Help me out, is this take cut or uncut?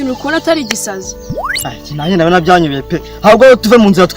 uncut